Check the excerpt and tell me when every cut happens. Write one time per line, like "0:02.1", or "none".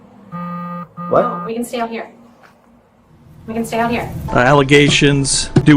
0:04.2